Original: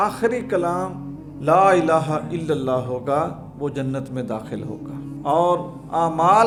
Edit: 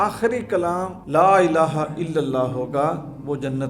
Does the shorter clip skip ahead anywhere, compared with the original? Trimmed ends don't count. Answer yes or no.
yes